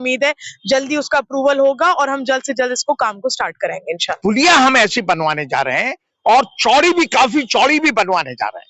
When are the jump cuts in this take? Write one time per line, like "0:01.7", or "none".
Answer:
0:04.1